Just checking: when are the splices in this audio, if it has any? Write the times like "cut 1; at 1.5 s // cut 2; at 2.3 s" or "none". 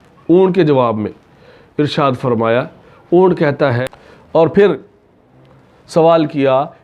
cut 1; at 3.8 s